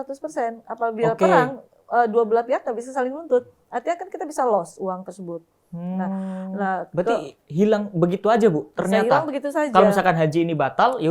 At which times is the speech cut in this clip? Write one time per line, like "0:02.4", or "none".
none